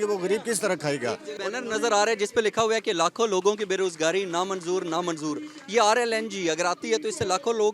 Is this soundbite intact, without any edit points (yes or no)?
no